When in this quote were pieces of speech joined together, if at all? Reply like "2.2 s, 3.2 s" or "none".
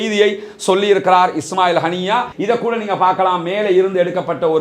2.3 s